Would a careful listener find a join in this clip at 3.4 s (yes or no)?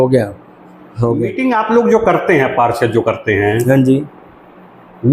no